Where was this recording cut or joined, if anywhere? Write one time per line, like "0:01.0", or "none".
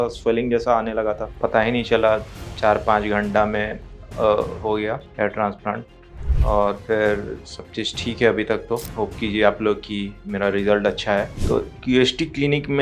0:01.3
0:11.3